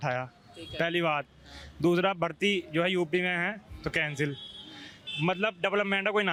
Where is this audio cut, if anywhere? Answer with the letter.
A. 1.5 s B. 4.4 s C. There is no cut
C